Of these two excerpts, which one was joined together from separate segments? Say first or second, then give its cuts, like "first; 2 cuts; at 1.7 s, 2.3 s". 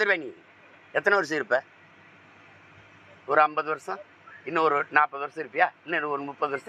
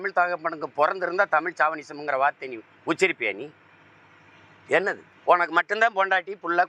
second; 1 cut; at 5.1 s